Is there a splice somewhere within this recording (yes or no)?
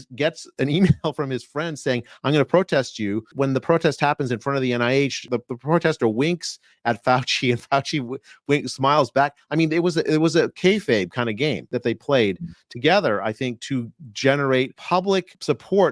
yes